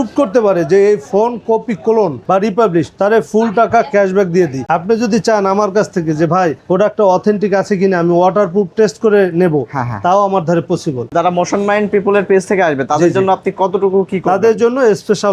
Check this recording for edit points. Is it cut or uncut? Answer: cut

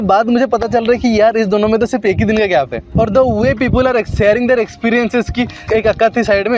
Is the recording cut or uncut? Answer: uncut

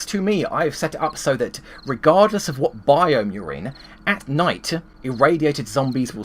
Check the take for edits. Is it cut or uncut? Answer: cut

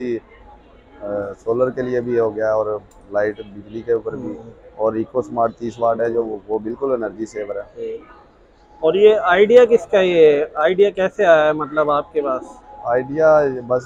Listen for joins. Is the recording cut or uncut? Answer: uncut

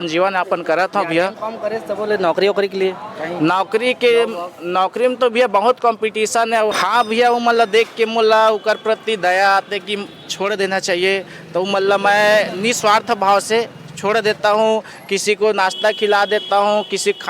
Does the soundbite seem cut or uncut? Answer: cut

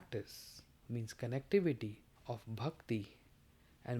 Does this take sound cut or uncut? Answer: cut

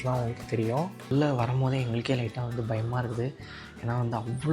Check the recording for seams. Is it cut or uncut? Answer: cut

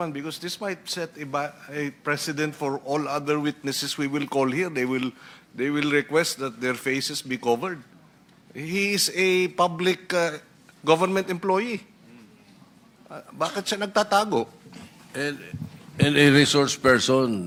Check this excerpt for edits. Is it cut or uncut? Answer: uncut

